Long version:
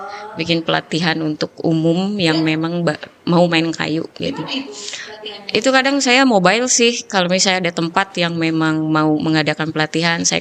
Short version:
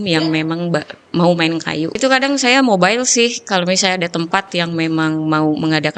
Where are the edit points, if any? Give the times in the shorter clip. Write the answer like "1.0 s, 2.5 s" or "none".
2.0 s